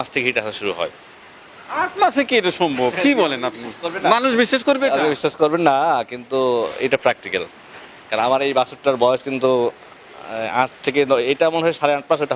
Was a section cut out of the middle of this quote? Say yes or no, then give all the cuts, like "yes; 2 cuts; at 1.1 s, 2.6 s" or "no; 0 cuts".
no; 0 cuts